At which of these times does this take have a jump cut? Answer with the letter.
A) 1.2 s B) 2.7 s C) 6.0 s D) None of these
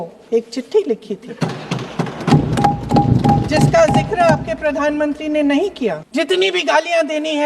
C